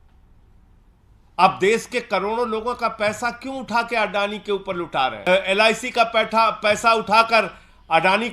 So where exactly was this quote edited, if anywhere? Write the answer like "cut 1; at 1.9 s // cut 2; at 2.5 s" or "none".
cut 1; at 5.2 s